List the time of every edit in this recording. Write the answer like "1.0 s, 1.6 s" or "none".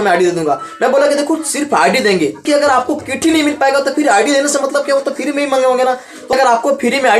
2.4 s, 6.2 s

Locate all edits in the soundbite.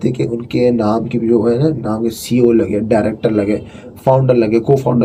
none

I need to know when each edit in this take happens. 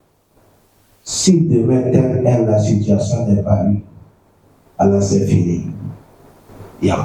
none

